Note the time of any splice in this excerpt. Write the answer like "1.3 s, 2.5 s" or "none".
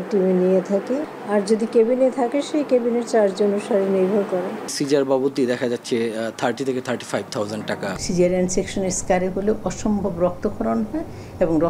1.1 s, 4.7 s, 8.0 s